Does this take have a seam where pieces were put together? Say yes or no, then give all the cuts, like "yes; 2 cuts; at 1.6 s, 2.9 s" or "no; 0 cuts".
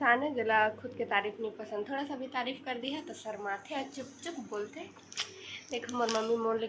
no; 0 cuts